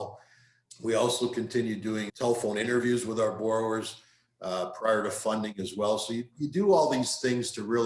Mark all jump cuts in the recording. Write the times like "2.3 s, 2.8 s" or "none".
2.1 s